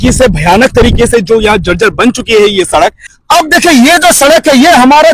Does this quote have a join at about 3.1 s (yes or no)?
yes